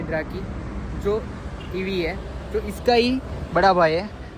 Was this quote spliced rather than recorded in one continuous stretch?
no; 0 cuts

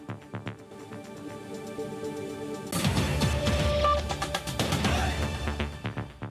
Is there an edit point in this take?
yes; 1 cut; at 2.7 s

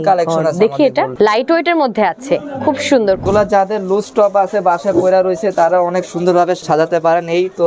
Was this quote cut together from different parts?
yes; 3 cuts; at 1.1 s, 3.2 s, 6.6 s

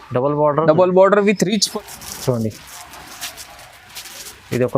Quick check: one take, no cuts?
no; 1 cut; at 1.7 s

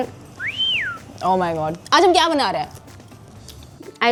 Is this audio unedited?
yes; 0 cuts

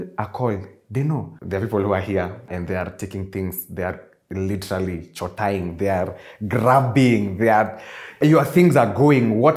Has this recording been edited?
yes; 3 cuts; at 1.3 s, 2.5 s, 8.2 s

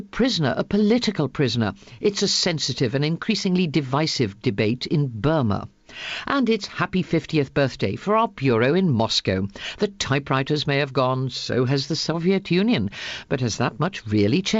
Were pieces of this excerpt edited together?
yes; 1 cut; at 13.4 s

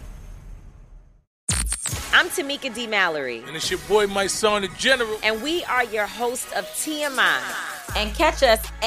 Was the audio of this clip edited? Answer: yes; 1 cut; at 1.3 s

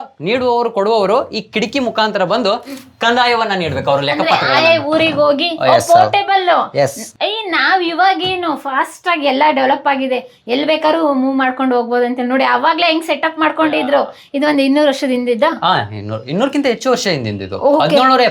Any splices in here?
no; 0 cuts

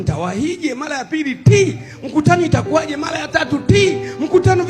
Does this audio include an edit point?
no; 0 cuts

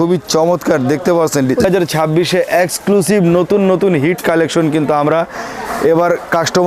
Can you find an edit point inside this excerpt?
yes; 1 cut; at 1.6 s

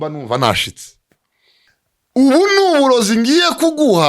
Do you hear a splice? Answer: yes; 1 cut; at 1.7 s

